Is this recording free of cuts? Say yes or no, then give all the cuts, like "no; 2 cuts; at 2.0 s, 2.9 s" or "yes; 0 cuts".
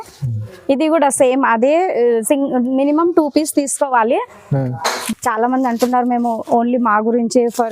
no; 1 cut; at 4.9 s